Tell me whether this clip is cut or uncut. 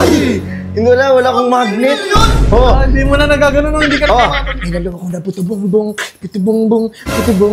uncut